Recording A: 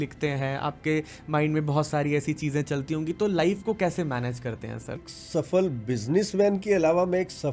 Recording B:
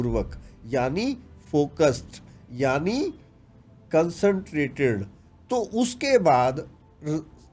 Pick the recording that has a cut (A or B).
A